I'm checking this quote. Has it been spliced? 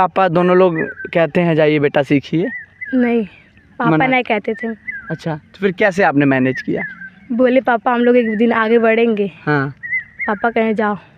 no; 0 cuts

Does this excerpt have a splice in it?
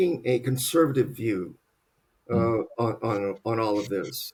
no; 0 cuts

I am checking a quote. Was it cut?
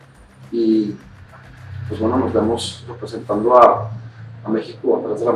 no; 0 cuts

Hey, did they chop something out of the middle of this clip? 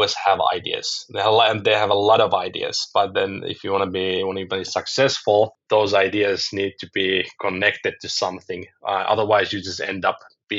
no; 0 cuts

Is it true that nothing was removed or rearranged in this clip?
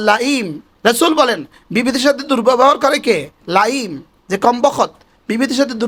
yes; 0 cuts

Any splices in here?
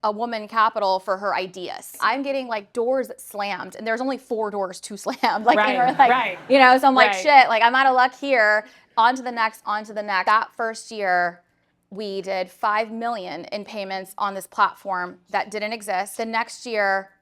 yes; 3 cuts; at 2.0 s, 10.2 s, 16.1 s

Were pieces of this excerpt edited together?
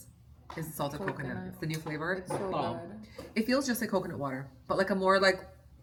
no; 0 cuts

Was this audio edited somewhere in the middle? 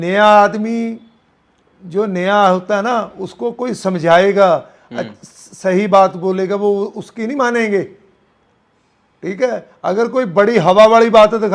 no; 0 cuts

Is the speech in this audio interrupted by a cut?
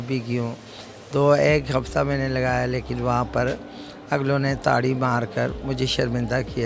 no; 0 cuts

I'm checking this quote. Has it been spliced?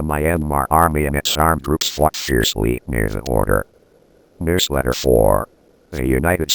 yes; 1 cut; at 4.3 s

